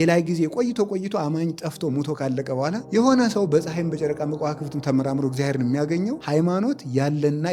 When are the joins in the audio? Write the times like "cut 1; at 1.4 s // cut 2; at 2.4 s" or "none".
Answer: cut 1; at 2.8 s // cut 2; at 6.2 s